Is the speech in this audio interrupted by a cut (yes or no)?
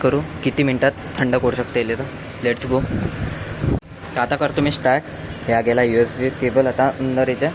no